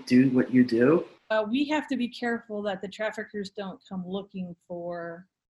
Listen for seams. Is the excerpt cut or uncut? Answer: cut